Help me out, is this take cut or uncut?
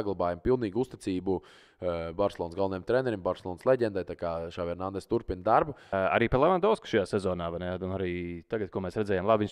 cut